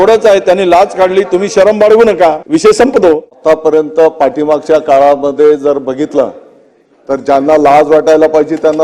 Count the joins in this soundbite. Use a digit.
2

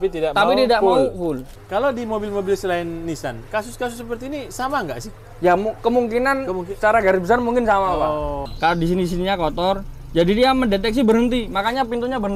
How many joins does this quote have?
2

